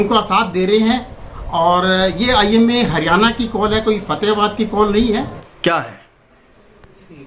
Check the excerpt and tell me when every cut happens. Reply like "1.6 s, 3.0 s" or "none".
5.4 s